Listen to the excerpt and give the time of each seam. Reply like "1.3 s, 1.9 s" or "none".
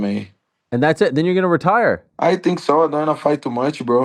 2.1 s